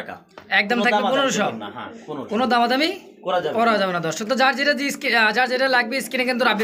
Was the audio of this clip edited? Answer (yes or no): no